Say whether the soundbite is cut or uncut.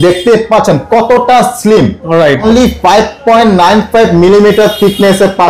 cut